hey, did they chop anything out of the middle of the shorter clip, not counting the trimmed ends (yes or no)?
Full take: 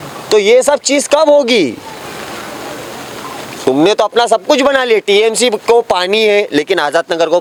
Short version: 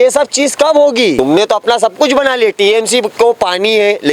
yes